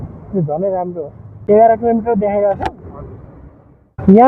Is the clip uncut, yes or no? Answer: no